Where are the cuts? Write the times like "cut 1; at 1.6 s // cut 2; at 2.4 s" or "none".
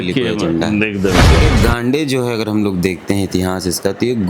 cut 1; at 1.4 s